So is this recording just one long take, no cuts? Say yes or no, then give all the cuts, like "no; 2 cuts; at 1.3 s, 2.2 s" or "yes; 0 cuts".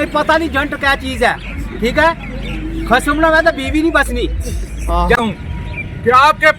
no; 1 cut; at 5.2 s